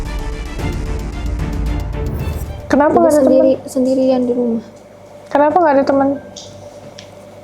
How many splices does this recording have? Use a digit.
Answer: 1